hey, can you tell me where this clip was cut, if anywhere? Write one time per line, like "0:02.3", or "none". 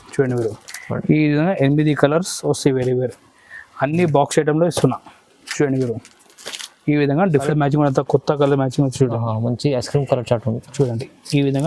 0:07.5